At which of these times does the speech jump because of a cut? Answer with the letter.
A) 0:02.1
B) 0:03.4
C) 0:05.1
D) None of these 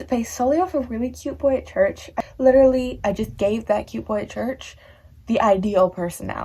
A